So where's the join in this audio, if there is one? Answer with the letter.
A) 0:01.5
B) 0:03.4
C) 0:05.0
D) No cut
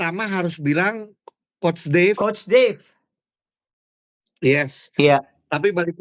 D